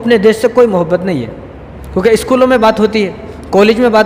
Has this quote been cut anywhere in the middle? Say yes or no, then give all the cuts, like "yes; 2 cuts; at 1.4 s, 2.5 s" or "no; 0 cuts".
no; 0 cuts